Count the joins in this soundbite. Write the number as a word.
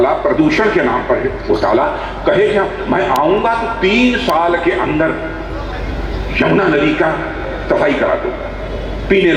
zero